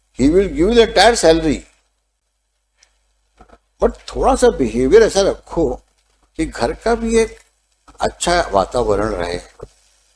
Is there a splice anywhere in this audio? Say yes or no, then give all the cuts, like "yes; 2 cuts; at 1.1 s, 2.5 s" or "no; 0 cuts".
no; 0 cuts